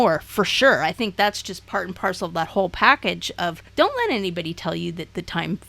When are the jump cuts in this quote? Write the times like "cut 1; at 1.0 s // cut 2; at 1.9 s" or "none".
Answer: cut 1; at 3.6 s